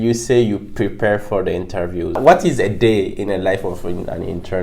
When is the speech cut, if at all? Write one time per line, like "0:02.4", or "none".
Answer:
0:02.2